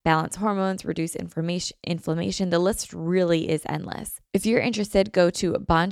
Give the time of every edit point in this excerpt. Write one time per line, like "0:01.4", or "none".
0:04.1